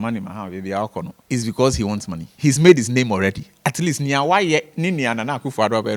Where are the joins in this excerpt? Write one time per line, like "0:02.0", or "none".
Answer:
0:01.2
0:02.2